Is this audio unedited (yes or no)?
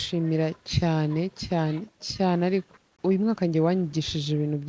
no